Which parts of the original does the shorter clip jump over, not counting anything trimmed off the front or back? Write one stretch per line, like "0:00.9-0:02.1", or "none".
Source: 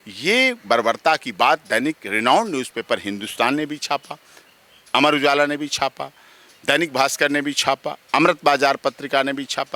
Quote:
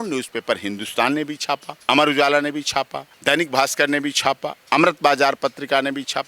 0:04.1-0:04.8
0:06.1-0:06.5